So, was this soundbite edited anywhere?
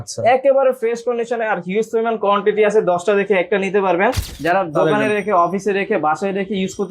yes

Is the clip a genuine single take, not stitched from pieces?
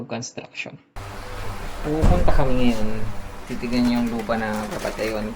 no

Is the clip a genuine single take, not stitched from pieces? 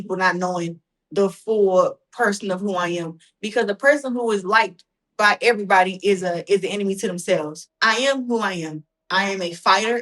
no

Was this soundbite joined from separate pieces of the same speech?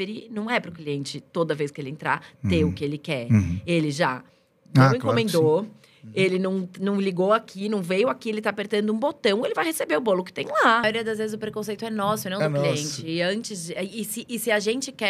yes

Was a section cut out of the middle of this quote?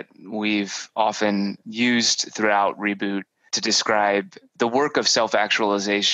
yes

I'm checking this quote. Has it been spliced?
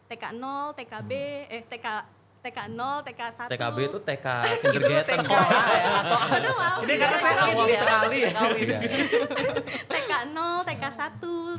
no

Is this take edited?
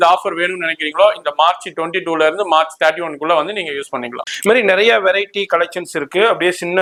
no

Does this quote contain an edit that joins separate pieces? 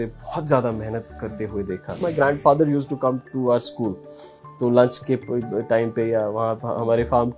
yes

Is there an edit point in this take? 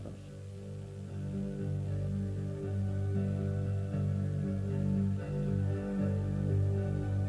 yes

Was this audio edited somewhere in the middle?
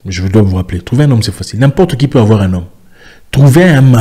no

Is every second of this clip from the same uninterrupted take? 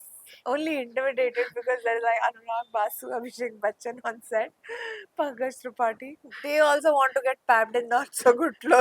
no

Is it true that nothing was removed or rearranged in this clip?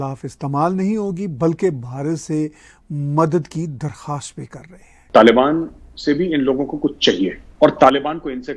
no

